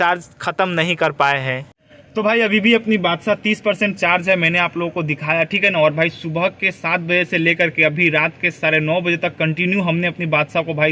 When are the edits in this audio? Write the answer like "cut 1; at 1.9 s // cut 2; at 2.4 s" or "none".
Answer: none